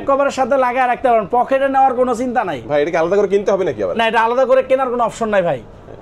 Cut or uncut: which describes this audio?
uncut